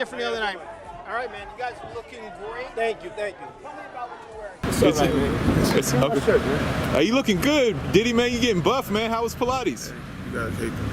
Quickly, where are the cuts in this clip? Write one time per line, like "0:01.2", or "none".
0:04.5